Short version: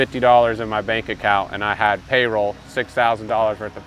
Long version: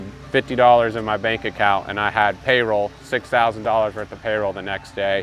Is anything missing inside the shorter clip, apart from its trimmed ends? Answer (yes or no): no